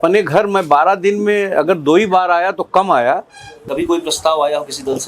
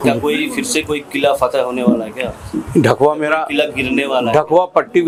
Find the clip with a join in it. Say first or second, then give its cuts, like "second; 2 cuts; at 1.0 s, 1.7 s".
first; 1 cut; at 3.5 s